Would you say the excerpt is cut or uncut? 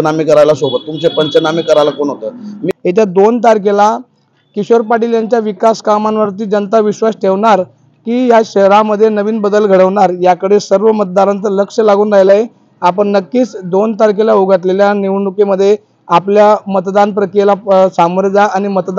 cut